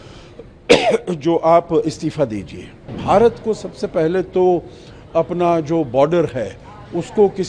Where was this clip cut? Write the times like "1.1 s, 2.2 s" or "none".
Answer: 3.0 s